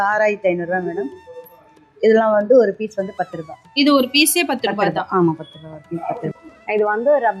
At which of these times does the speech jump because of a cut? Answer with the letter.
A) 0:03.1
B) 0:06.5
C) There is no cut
B